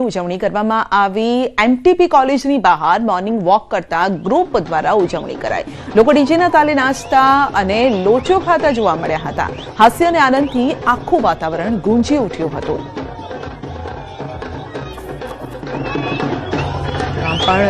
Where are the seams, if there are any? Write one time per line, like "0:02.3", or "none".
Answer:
0:00.9